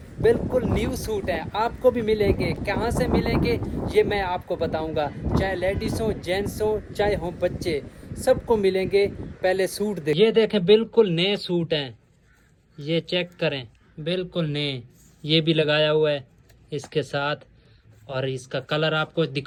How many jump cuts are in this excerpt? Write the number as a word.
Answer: zero